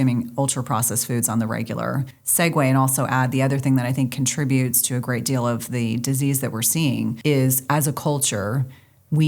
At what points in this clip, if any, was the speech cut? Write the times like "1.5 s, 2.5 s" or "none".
2.2 s, 7.2 s